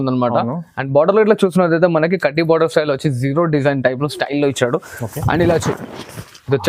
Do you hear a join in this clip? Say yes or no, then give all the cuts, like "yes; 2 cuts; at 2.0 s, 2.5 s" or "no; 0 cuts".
no; 0 cuts